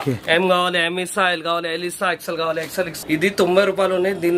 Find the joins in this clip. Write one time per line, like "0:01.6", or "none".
0:03.0